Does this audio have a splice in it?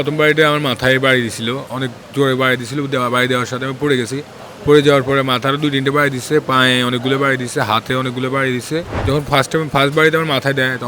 yes; 1 cut; at 8.9 s

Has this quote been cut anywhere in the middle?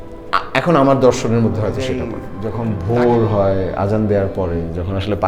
yes; 1 cut; at 2.3 s

